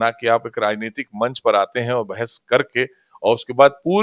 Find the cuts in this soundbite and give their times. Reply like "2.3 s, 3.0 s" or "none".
none